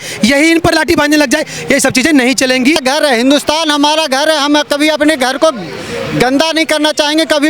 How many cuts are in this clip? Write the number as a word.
one